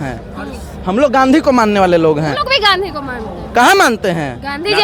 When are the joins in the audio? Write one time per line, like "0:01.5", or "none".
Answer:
none